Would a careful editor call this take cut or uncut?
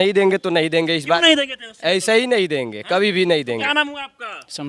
cut